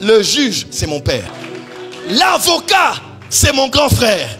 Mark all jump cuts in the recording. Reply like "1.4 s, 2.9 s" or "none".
1.4 s